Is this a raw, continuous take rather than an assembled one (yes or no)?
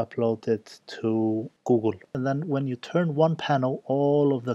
no